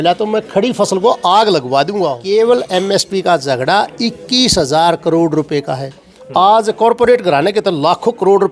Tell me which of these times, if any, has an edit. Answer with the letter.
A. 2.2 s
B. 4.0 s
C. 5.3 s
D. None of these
A